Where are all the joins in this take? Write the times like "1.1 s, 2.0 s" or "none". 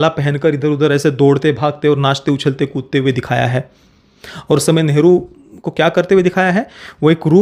none